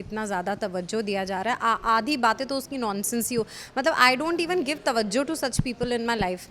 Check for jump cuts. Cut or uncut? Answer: uncut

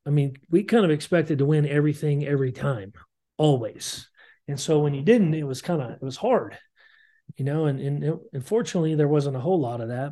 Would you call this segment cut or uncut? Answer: uncut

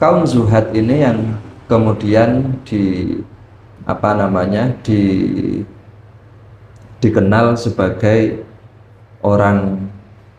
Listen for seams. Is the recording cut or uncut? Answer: uncut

